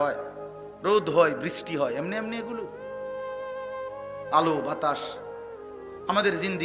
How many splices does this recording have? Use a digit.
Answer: 0